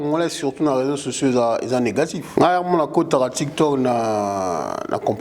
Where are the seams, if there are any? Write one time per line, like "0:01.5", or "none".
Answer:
0:02.2